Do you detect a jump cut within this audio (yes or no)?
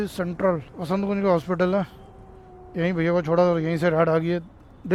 no